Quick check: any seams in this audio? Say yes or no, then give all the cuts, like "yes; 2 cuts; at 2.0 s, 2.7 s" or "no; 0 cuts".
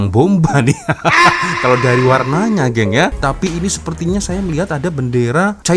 yes; 1 cut; at 3.2 s